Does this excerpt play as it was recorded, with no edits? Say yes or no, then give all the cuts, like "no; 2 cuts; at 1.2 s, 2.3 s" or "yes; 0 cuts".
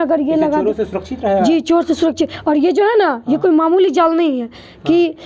yes; 0 cuts